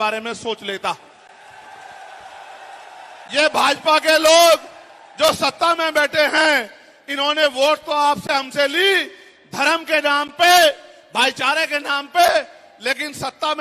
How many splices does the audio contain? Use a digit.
0